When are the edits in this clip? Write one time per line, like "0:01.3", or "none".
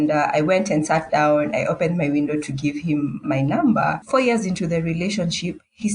0:04.0